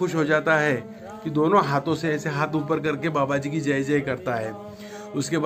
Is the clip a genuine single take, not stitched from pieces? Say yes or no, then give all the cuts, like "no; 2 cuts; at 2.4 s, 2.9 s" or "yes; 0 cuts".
yes; 0 cuts